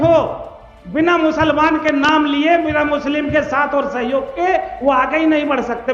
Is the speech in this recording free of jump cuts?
yes; 0 cuts

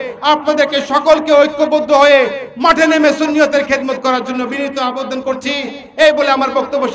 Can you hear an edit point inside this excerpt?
no; 0 cuts

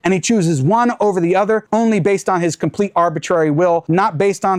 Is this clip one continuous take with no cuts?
yes; 0 cuts

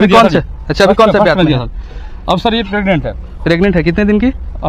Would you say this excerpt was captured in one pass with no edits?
yes; 0 cuts

